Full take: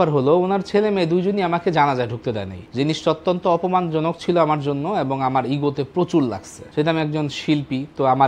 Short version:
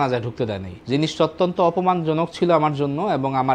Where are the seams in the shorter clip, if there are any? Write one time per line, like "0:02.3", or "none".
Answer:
none